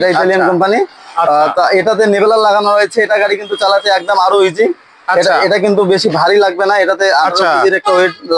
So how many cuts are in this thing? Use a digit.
0